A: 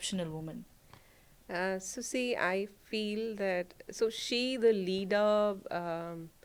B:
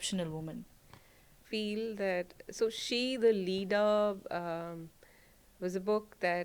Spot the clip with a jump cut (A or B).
B